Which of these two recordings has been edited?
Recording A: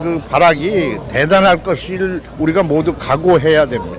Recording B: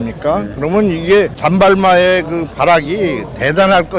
B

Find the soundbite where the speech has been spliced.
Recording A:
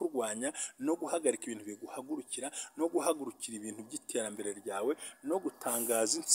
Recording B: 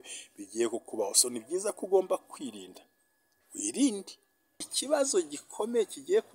B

